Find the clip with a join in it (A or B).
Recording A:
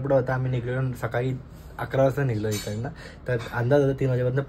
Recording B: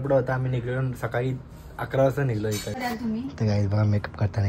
B